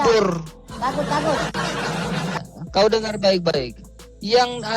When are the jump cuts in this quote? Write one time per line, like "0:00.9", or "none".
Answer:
0:02.4